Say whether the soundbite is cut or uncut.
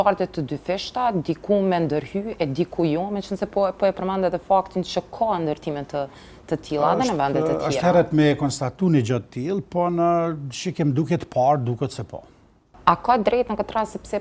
uncut